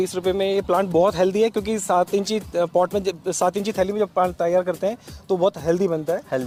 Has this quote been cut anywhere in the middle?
no; 0 cuts

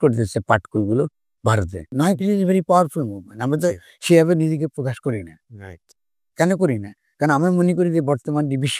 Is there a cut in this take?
yes; 1 cut; at 1.8 s

